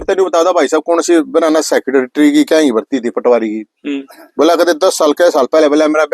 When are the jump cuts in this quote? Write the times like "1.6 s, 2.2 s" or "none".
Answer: none